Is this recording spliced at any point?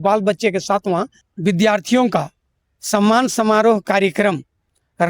yes; 1 cut; at 1.2 s

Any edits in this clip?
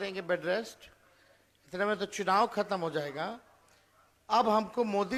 no; 0 cuts

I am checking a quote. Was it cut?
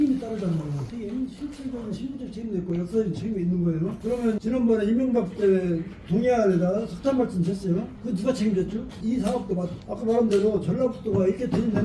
yes; 2 cuts; at 4.4 s, 9.0 s

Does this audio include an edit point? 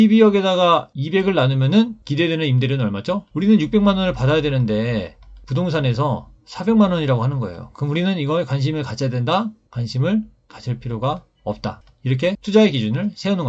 yes; 2 cuts; at 3.3 s, 9.6 s

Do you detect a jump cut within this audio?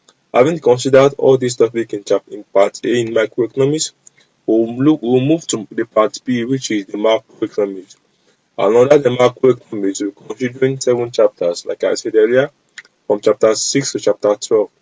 no; 0 cuts

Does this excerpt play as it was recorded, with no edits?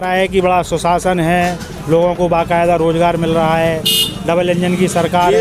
yes; 0 cuts

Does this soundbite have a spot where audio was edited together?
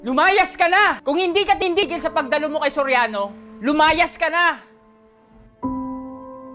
yes; 1 cut; at 1.0 s

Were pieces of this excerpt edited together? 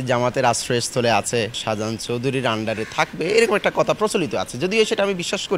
no; 0 cuts

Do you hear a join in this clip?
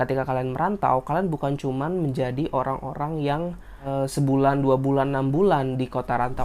yes; 1 cut; at 3.9 s

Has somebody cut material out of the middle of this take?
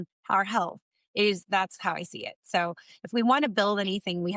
yes; 1 cut; at 1.3 s

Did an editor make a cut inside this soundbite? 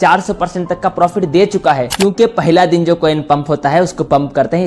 yes; 1 cut; at 1.9 s

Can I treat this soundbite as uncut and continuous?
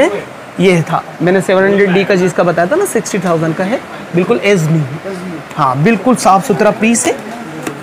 yes; 0 cuts

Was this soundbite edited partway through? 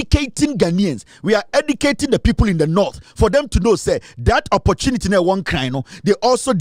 no; 0 cuts

